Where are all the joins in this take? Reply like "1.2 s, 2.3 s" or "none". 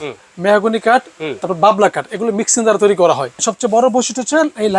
3.4 s